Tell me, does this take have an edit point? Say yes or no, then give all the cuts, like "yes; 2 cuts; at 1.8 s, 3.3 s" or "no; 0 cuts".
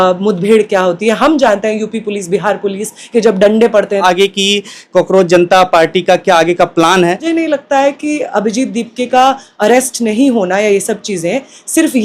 yes; 2 cuts; at 4.0 s, 7.3 s